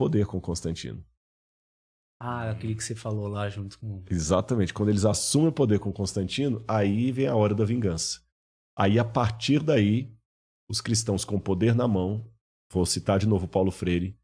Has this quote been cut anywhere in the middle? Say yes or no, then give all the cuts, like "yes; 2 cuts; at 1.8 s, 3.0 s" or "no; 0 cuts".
no; 0 cuts